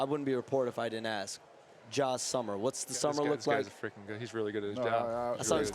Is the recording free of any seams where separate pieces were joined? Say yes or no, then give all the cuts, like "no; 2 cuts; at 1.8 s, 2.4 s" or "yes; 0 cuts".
no; 1 cut; at 3.7 s